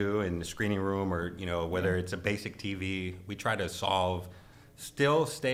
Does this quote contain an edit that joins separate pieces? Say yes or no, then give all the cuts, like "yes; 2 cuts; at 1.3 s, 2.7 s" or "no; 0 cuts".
no; 0 cuts